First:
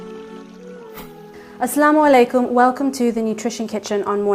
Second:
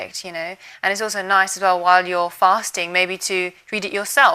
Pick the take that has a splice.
first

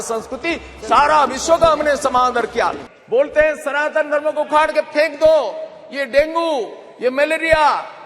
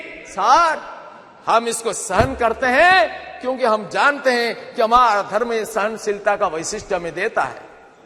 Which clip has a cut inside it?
first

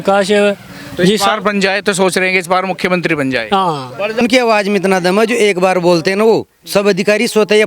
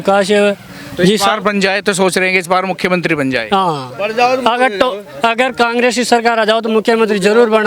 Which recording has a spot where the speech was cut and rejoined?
first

